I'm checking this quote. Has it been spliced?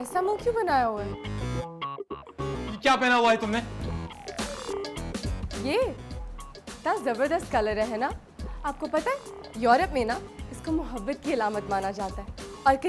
no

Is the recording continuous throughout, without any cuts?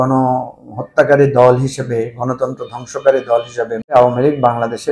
no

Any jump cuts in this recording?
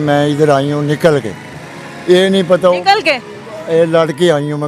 no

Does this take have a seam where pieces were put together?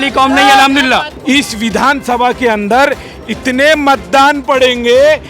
yes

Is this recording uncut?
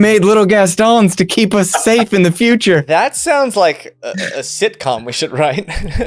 yes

